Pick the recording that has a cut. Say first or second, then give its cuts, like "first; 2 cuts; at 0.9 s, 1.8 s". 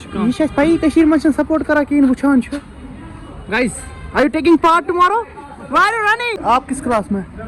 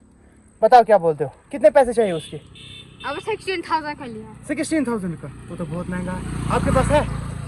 first; 1 cut; at 6.4 s